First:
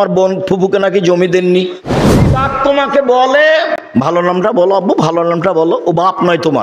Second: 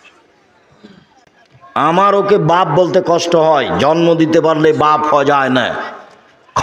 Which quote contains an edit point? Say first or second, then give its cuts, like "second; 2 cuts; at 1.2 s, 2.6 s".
first; 1 cut; at 2.3 s